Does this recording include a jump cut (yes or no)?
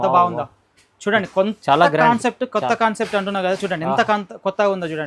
no